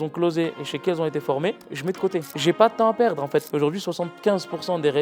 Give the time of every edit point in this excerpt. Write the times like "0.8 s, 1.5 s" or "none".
3.5 s